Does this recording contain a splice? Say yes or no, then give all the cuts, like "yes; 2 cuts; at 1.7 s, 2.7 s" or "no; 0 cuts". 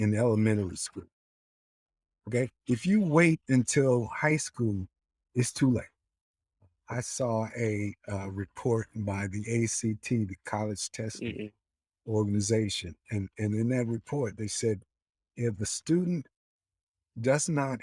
no; 0 cuts